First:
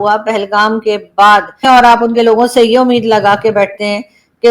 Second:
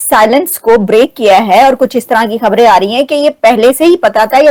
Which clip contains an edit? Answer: first; 1 cut; at 1.6 s

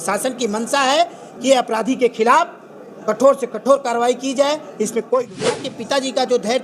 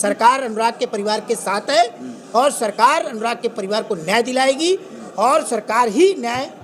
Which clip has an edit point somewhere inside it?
first; 1 cut; at 5.7 s

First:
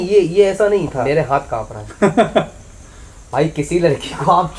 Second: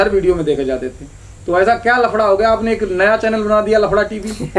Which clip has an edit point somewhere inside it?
first; 1 cut; at 1.0 s

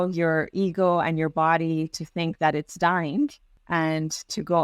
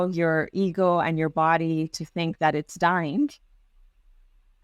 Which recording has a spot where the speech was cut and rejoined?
first; 1 cut; at 3.5 s

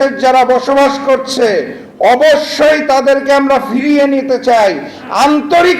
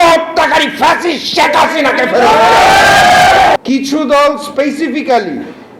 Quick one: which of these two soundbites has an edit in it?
second; 1 cut; at 3.6 s

